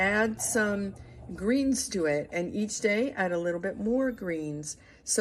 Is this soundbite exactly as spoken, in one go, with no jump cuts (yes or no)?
yes